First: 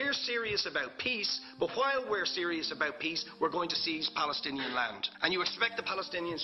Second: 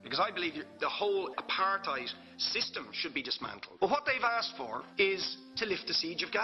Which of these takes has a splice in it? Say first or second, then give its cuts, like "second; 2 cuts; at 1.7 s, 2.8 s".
second; 1 cut; at 1.3 s